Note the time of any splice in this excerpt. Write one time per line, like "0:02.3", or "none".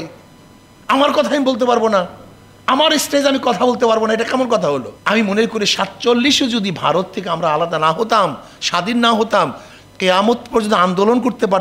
0:04.9

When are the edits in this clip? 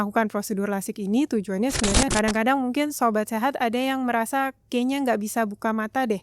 0:02.1

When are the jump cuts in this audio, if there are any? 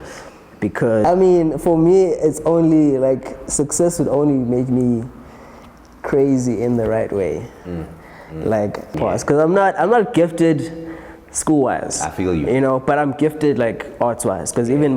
0:01.0
0:08.9

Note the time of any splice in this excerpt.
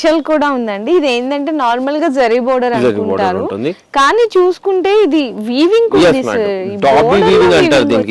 none

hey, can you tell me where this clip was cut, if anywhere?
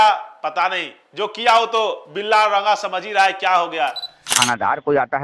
0:04.3

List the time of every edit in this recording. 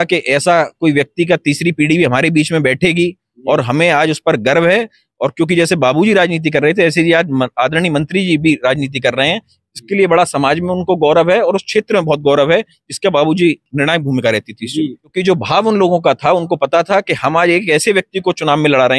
0:15.1

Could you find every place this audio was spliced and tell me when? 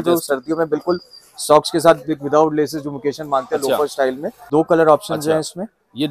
0:04.3

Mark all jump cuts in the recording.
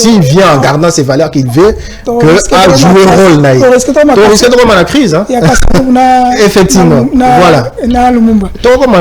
none

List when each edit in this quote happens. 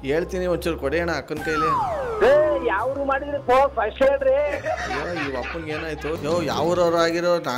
0:06.1

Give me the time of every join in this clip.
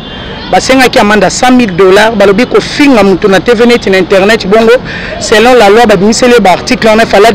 none

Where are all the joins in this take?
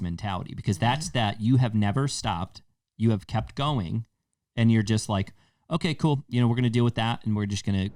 none

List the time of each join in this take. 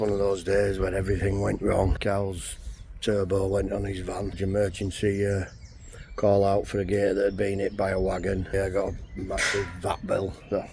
0:02.0
0:04.4
0:08.5

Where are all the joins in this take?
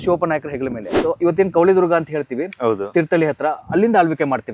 0:00.9

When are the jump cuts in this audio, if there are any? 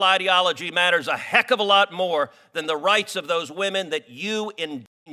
none

